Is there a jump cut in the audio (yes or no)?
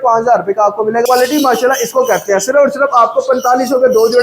yes